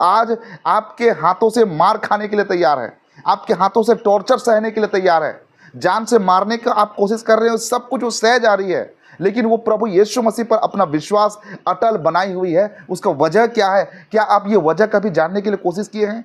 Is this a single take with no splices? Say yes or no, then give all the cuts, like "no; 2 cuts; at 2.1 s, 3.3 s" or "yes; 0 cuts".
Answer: yes; 0 cuts